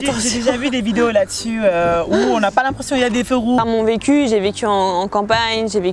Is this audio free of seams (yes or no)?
no